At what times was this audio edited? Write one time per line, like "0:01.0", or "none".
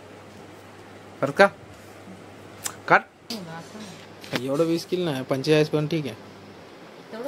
0:03.3